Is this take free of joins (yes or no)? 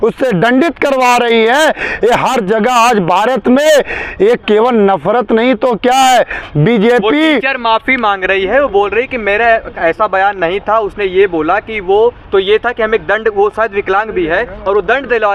yes